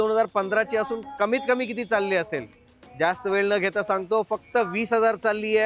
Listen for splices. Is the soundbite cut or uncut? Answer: uncut